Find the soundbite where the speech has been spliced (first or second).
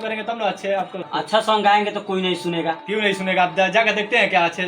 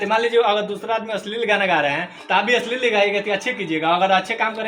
first